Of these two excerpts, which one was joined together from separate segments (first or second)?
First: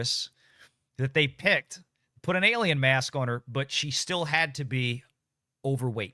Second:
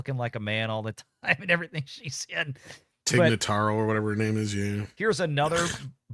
second